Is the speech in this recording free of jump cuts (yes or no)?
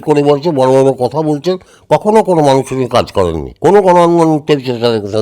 no